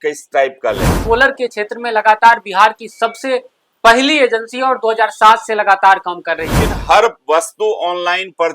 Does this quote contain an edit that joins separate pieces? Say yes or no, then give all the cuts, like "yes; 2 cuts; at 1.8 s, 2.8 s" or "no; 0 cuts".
yes; 2 cuts; at 0.9 s, 6.7 s